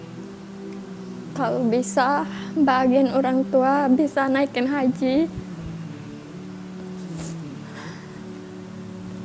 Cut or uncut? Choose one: uncut